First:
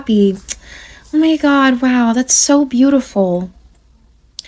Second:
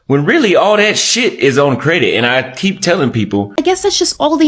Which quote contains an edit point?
second; 1 cut; at 3.5 s

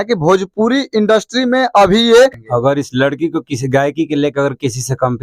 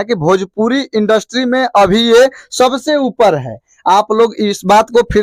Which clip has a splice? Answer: first; 1 cut; at 2.4 s

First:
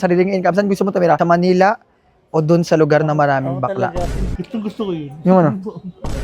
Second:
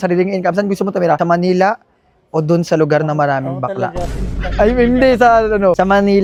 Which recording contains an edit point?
first; 1 cut; at 4.3 s

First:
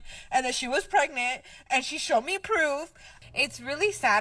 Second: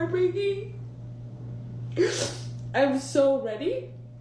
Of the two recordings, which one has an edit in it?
first; 1 cut; at 3.1 s

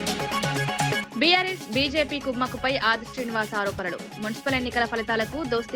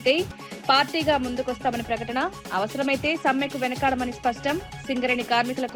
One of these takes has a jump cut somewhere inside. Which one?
first; 1 cut; at 1.0 s

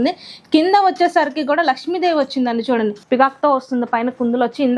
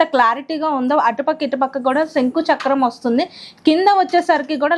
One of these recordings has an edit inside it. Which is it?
first; 1 cut; at 3.0 s

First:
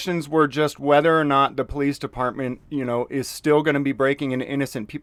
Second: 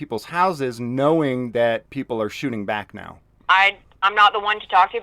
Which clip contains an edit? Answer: second; 1 cut; at 3.3 s

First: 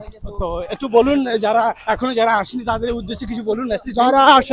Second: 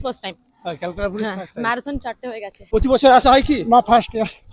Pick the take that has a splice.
second; 1 cut; at 2.5 s

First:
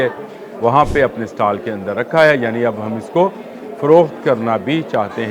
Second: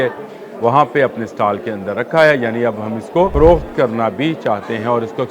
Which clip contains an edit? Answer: second; 1 cut; at 3.3 s

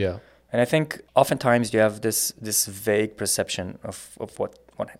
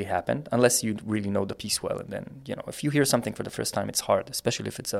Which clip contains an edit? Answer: first; 1 cut; at 1.0 s

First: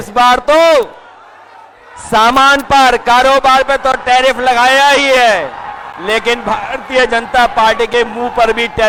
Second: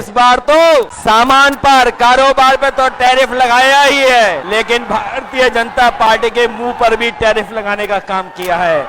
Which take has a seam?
second; 2 cuts; at 0.9 s, 4.4 s

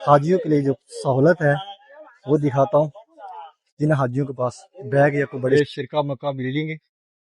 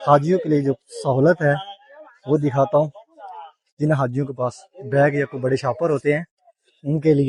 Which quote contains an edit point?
first; 1 cut; at 5.5 s

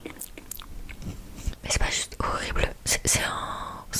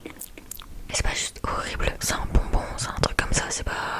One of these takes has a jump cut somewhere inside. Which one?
second; 2 cuts; at 0.9 s, 2.0 s

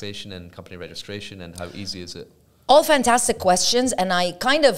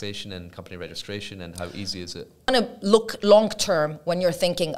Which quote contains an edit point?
second; 1 cut; at 2.5 s

